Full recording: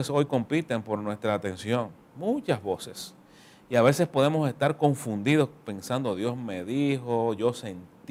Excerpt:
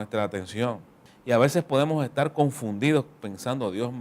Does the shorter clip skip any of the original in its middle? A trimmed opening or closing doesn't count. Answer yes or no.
yes